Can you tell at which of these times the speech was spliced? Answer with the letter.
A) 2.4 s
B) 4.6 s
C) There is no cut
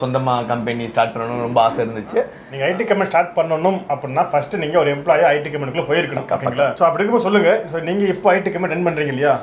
A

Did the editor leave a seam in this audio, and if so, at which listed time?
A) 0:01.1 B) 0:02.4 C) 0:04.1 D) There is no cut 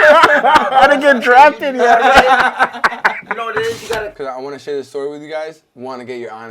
C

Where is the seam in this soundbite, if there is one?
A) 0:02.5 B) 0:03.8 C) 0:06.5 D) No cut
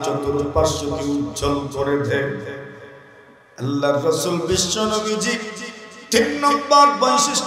D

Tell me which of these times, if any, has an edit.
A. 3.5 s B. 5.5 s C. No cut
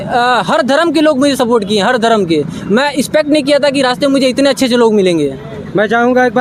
C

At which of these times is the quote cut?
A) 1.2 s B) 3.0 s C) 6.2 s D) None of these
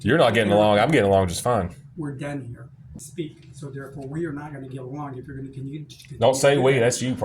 B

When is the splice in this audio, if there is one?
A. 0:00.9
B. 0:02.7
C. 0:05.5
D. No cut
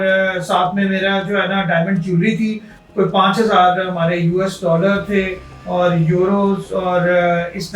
B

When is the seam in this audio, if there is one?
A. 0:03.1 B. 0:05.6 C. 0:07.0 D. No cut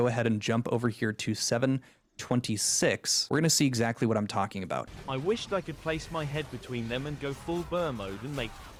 D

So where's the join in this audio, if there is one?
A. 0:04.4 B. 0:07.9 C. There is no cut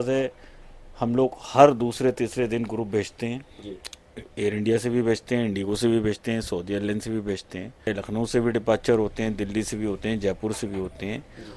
B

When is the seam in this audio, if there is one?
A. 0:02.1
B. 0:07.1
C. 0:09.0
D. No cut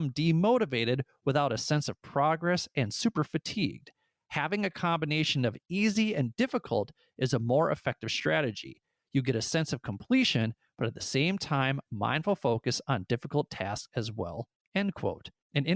D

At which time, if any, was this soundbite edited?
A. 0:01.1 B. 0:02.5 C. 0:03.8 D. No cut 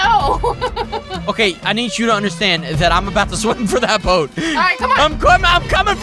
A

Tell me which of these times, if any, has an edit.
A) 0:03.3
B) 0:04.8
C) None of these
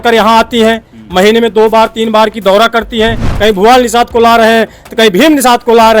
A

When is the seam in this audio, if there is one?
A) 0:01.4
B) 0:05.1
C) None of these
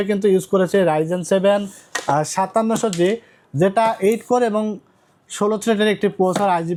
C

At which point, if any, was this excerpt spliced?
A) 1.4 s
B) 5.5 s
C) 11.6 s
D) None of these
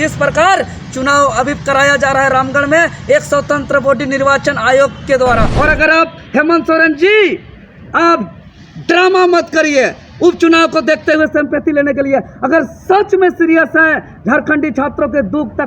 B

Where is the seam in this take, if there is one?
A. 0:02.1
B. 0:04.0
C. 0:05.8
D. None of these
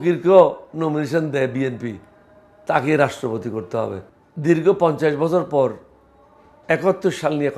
B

